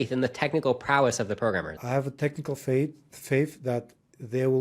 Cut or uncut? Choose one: cut